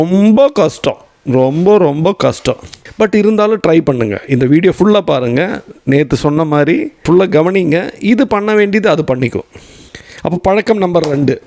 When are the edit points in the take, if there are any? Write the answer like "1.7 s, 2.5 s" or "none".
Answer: none